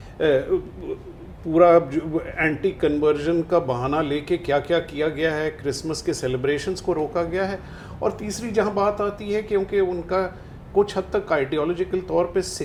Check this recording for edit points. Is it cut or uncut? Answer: uncut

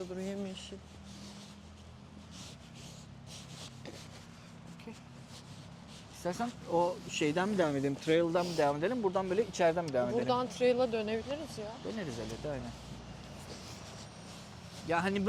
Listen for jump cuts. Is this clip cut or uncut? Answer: uncut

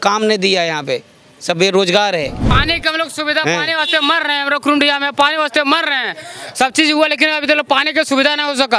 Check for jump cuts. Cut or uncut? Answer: cut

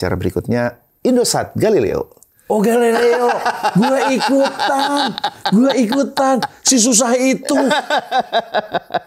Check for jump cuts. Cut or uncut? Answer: uncut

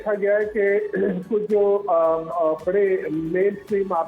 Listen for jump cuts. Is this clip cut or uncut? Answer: uncut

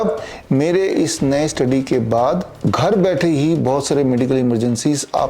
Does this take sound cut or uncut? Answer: cut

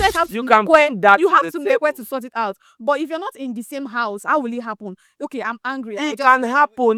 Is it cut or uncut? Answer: uncut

